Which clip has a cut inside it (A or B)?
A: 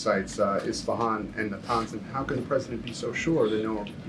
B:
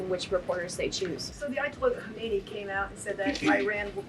B